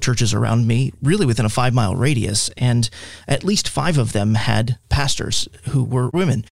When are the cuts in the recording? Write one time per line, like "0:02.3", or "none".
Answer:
0:00.9